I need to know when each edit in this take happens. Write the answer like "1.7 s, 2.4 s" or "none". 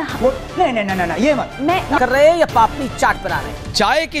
2.0 s